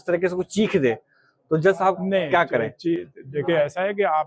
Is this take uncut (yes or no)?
yes